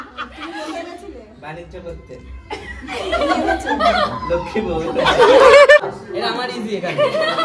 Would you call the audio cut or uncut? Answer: cut